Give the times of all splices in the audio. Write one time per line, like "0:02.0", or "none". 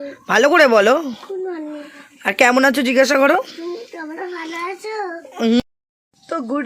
0:05.6

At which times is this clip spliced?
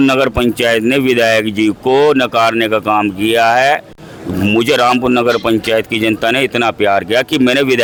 none

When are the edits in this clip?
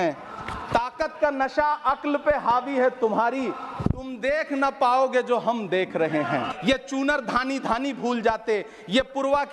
0:06.5

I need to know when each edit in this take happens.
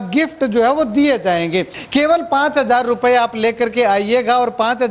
0:01.8

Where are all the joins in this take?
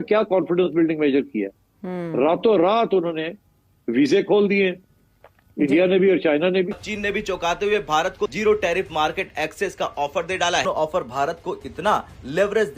0:06.9
0:10.6

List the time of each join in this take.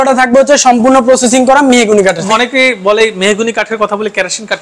0:02.2

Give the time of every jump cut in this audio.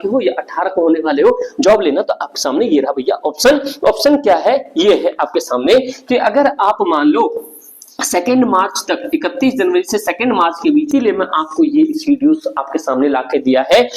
0:10.9

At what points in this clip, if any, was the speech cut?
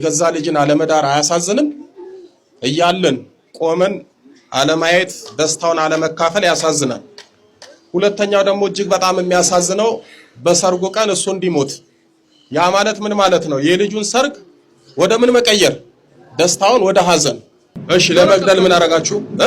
0:17.8

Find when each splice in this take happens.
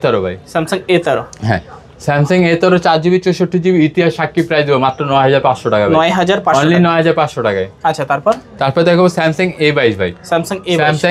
none

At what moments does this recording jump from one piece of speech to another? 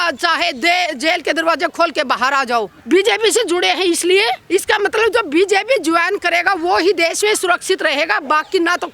0:02.8
0:04.4

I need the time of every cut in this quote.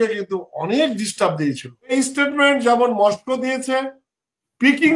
0:01.9

